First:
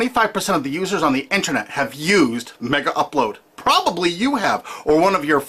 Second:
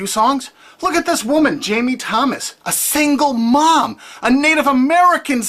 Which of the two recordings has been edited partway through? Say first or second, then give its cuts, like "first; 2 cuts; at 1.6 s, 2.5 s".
second; 1 cut; at 3.4 s